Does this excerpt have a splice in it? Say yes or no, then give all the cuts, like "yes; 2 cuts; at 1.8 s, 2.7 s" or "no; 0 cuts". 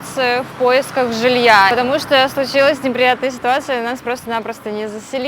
yes; 1 cut; at 1.7 s